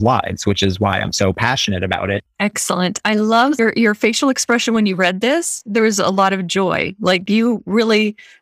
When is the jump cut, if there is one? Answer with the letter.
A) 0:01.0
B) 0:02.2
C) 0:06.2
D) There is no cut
B